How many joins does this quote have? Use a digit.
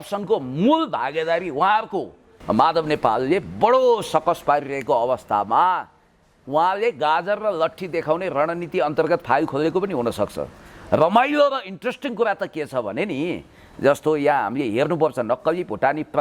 1